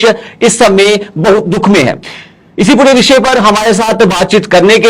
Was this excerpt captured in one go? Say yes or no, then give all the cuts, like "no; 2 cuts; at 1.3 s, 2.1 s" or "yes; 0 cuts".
yes; 0 cuts